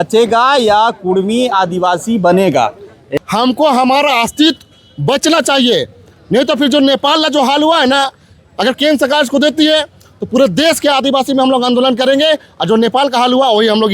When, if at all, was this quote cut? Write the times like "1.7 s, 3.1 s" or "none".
3.1 s